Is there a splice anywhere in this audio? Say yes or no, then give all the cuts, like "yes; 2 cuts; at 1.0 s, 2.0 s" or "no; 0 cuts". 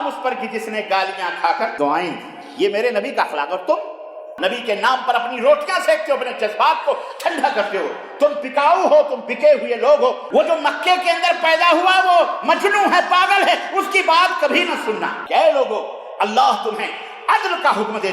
yes; 4 cuts; at 1.7 s, 4.3 s, 10.2 s, 15.2 s